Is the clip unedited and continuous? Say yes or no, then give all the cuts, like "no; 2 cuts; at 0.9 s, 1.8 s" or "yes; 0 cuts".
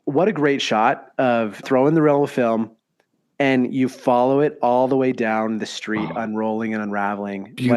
no; 1 cut; at 1.6 s